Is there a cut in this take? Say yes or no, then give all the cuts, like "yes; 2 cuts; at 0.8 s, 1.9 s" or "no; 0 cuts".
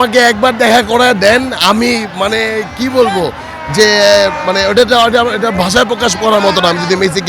no; 0 cuts